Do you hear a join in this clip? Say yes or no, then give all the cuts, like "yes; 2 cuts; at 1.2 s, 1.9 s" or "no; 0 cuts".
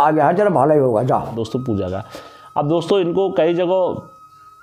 yes; 1 cut; at 1.4 s